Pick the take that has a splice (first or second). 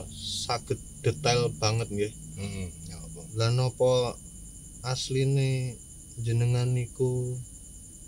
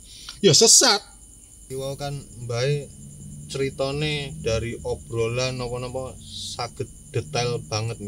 second